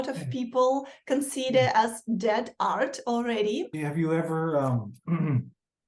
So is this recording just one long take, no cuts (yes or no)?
no